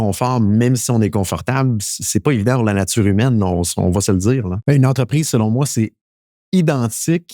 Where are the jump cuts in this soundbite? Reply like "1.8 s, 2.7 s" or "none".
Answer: 4.5 s